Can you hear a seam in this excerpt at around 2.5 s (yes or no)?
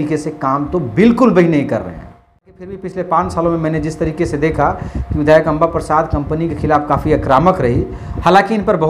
yes